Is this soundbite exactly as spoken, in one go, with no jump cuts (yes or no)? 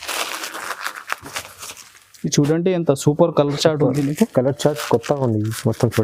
yes